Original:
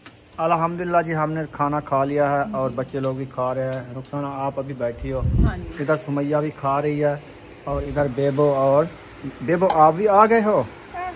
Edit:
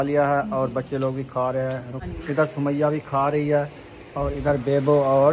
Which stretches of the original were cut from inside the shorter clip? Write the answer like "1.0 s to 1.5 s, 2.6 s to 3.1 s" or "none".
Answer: 4.1 s to 5.6 s